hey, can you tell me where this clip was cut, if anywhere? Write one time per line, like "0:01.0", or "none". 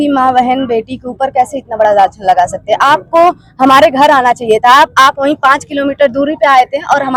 none